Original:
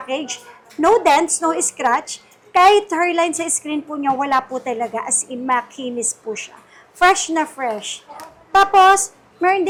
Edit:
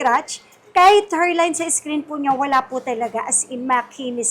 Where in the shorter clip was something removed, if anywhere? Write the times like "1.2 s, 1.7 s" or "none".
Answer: none